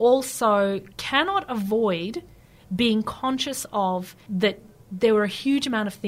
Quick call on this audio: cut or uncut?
cut